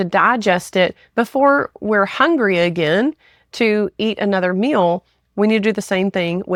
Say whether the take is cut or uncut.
uncut